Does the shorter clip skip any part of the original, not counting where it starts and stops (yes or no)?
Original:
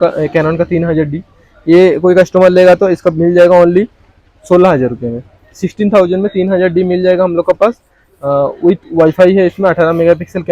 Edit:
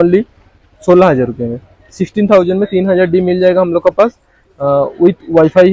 no